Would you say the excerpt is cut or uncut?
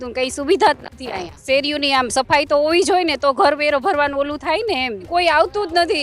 cut